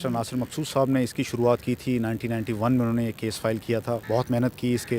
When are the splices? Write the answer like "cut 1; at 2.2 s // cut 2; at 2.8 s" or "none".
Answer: cut 1; at 4.0 s